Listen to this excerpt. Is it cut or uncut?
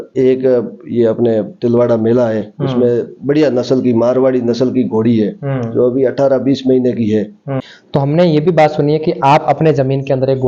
cut